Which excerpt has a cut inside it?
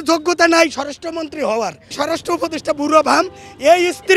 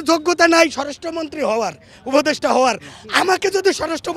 first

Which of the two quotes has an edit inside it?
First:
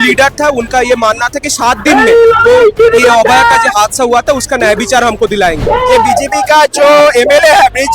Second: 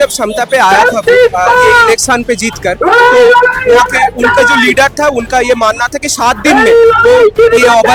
first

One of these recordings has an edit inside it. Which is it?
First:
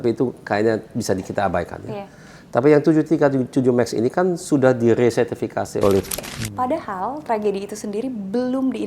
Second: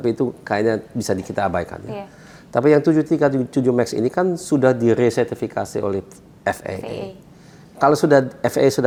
first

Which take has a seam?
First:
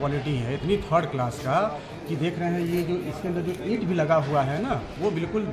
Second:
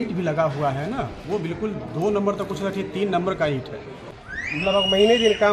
second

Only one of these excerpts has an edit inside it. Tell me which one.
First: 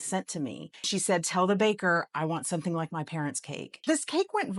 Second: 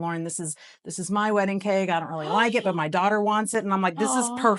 first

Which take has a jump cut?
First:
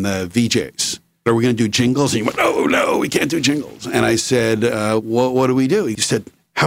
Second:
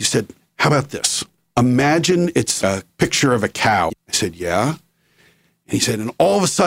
second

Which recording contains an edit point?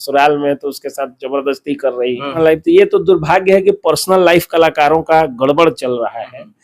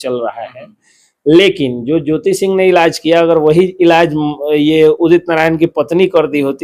first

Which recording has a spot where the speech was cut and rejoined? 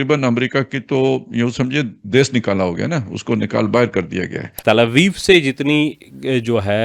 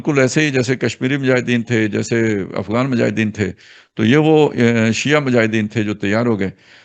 first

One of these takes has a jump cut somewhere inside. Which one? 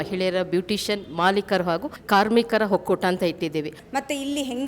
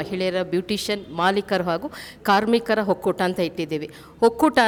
first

